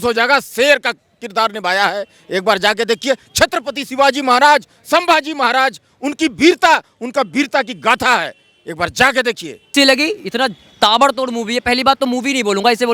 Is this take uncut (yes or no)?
no